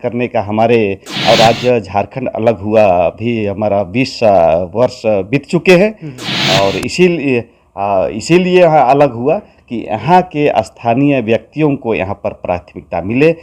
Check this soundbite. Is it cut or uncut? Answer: cut